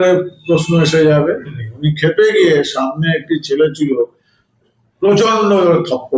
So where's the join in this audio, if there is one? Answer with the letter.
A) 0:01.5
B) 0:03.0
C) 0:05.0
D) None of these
A